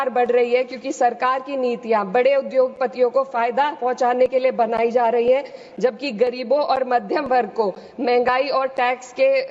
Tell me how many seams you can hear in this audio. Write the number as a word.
zero